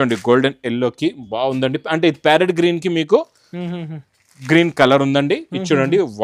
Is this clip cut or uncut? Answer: uncut